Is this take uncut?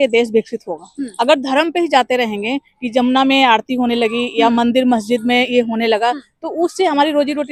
yes; 0 cuts

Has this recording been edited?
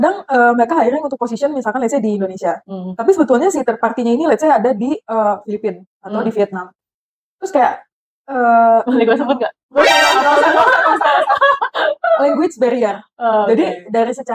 no; 0 cuts

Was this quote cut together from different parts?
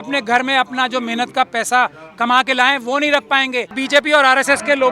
yes; 1 cut; at 3.8 s

